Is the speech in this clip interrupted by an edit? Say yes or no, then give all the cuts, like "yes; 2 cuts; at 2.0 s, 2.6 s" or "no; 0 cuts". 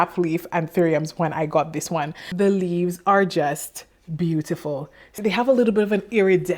yes; 2 cuts; at 2.2 s, 5.1 s